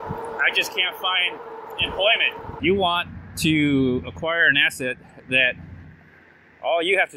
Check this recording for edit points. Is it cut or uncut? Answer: cut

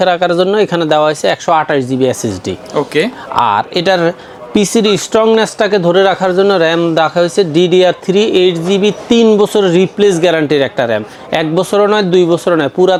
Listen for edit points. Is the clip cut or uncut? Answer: uncut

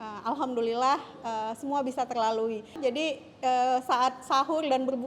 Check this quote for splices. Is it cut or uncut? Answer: cut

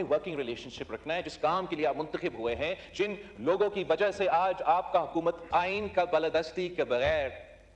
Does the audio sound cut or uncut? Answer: cut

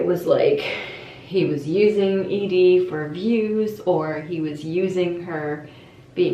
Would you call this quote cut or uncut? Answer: uncut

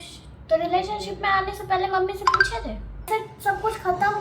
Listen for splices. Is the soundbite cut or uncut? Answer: cut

